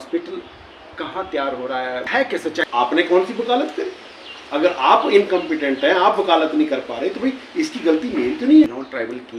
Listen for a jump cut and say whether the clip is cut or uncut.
cut